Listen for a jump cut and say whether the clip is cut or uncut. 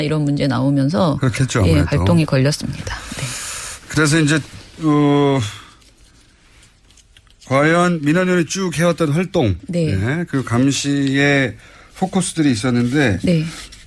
cut